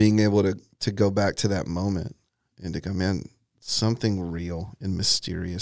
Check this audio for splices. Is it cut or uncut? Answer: uncut